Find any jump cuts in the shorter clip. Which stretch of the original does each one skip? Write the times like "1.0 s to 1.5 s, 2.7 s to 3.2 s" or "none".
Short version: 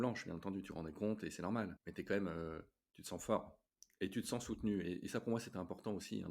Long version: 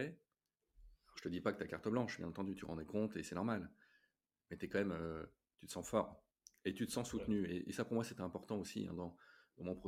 3.7 s to 4.5 s